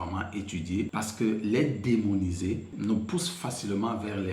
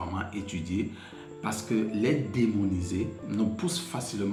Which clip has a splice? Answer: first; 1 cut; at 0.9 s

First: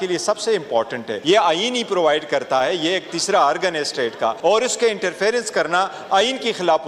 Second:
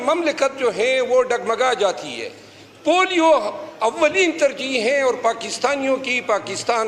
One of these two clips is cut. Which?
first; 2 cuts; at 1.1 s, 4.4 s

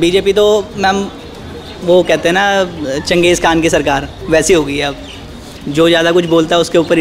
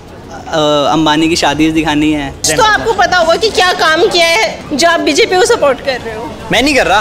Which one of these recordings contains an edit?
second; 2 cuts; at 2.5 s, 4.7 s

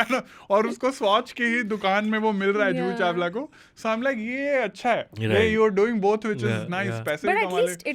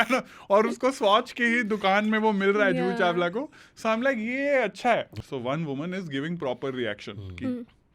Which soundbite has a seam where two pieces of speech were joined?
second; 1 cut; at 5.1 s

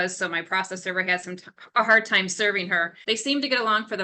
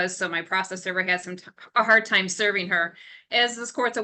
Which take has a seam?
first; 1 cut; at 2.9 s

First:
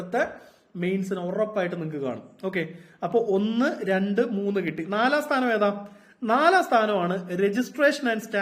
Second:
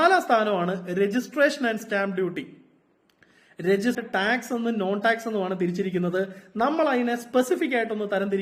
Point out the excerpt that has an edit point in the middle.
second; 1 cut; at 4.0 s

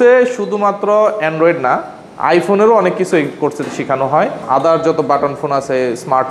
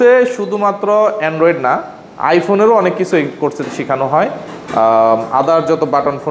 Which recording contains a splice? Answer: first; 1 cut; at 4.4 s

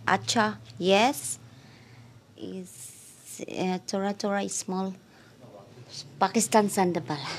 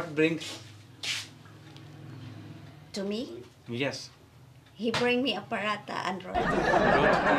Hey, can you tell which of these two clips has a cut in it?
second; 1 cut; at 6.2 s

